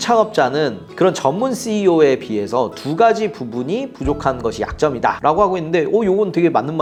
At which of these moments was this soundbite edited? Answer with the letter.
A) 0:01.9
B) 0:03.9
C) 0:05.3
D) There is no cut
D